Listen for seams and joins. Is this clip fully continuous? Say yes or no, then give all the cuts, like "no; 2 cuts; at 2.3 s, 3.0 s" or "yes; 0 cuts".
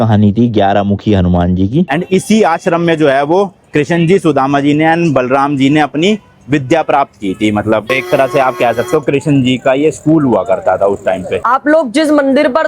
no; 3 cuts; at 1.9 s, 7.8 s, 11.4 s